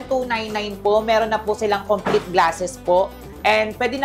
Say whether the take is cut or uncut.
uncut